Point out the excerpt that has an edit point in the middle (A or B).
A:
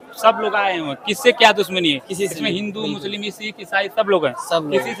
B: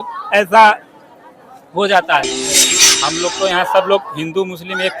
B